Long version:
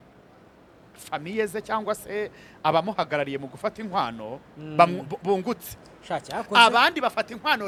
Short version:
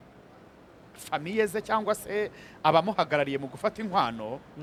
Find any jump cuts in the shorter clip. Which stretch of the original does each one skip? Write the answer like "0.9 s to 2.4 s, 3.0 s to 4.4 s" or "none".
none

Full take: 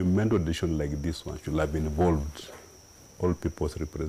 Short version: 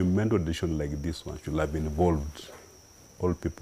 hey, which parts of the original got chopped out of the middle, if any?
none

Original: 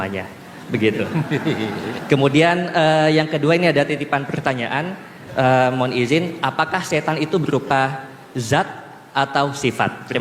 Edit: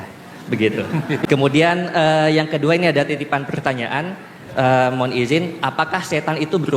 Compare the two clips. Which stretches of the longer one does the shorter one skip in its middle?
1.4 s to 2.0 s

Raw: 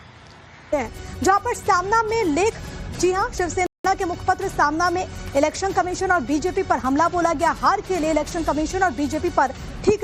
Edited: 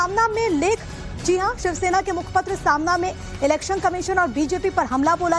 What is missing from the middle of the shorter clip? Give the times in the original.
3.7 s to 3.8 s

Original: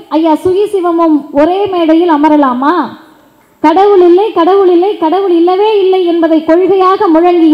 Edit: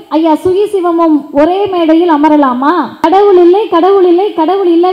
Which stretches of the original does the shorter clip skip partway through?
3.0 s to 3.7 s

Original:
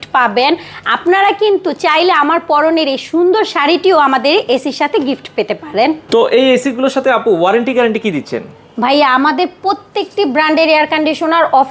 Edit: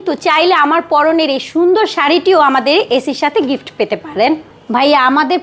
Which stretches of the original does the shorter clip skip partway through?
6.0 s to 8.5 s

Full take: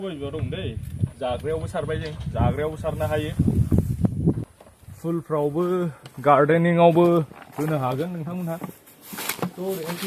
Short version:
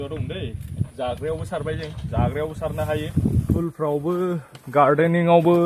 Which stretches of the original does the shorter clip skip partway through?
3.8 s to 5.1 s

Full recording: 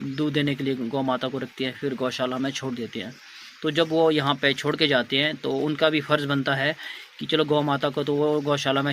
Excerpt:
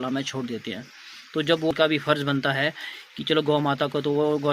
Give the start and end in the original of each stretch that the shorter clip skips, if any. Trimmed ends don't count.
4.0 s to 5.7 s

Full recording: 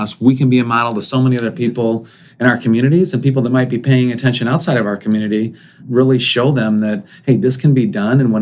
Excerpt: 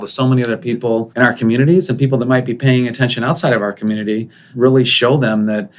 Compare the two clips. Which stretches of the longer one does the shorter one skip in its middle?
2.0 s to 2.3 s, 5.6 s to 5.7 s

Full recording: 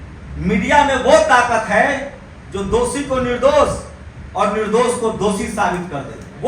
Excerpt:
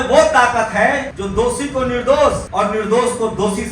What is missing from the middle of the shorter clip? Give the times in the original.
2.1 s to 2.5 s, 3.8 s to 4.3 s

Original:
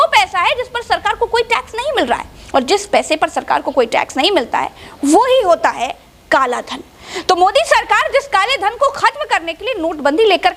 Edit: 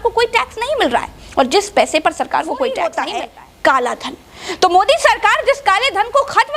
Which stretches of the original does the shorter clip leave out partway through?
4.1 s to 5.6 s

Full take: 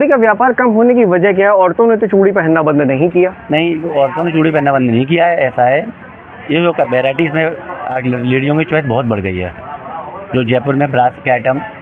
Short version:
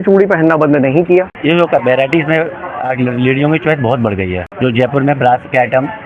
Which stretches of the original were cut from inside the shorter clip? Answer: 3.4 s to 6.4 s, 9.5 s to 10.2 s

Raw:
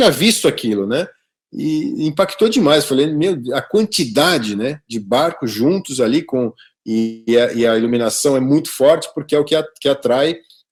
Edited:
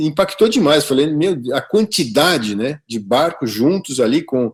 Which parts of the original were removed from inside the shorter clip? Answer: none

